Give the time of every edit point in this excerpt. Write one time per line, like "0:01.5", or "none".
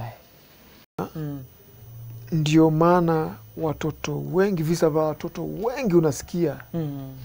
0:01.0